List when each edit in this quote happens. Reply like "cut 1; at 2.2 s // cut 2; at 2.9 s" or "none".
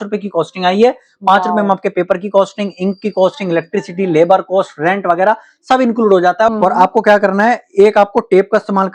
cut 1; at 6.5 s